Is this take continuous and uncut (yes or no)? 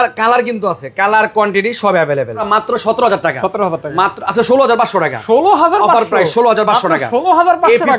no